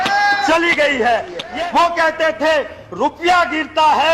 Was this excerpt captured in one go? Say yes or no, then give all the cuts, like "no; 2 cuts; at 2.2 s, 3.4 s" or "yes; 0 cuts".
no; 1 cut; at 1.4 s